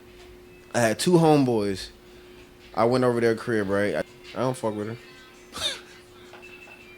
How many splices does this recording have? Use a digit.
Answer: 1